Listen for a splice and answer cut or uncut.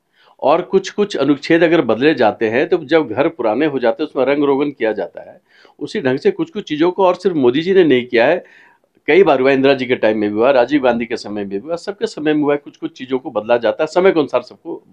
uncut